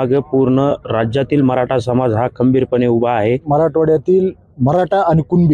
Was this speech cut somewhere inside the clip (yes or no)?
yes